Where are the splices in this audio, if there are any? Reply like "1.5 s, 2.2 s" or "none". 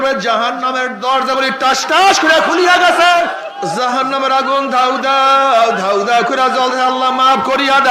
3.3 s